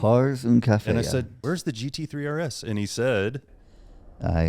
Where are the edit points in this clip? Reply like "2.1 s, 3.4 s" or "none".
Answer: 1.3 s, 3.6 s